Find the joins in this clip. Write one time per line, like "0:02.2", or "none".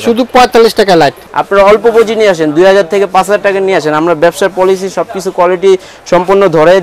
0:01.2